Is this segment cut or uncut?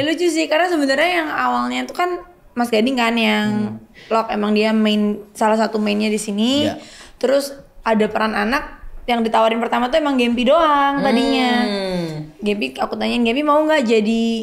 uncut